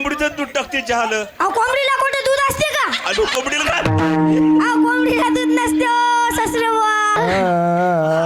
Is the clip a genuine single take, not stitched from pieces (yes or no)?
no